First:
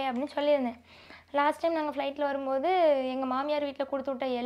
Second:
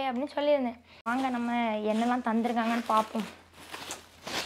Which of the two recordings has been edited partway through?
second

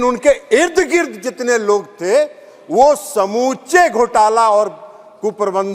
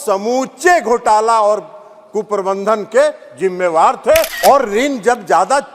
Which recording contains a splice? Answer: second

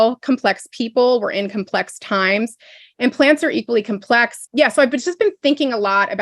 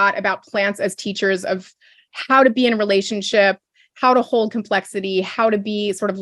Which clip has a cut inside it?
first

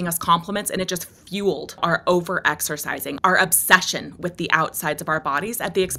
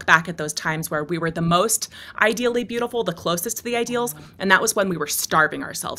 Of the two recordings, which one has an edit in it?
first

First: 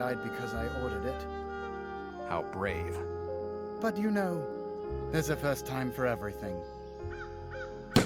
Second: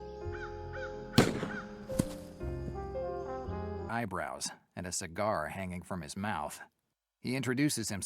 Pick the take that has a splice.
second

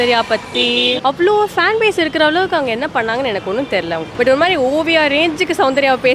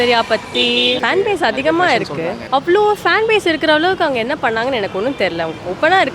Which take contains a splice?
first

